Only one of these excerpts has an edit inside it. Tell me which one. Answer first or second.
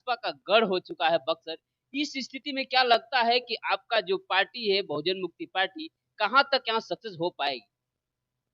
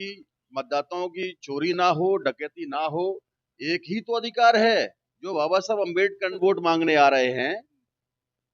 second